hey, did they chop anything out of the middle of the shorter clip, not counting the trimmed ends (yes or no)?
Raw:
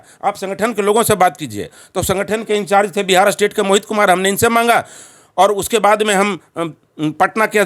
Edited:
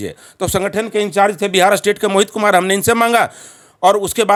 no